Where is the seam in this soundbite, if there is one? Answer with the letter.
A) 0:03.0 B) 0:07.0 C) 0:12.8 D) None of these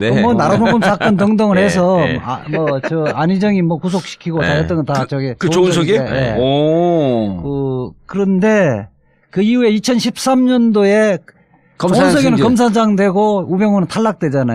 A